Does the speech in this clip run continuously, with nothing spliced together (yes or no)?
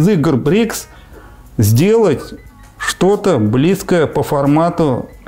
yes